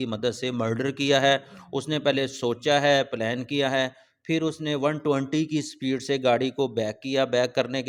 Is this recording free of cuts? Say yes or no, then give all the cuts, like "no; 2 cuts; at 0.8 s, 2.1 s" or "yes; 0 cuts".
yes; 0 cuts